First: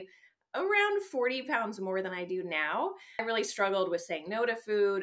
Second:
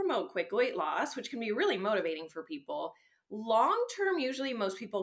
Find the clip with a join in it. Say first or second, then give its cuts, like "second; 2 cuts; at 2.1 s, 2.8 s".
first; 1 cut; at 3.2 s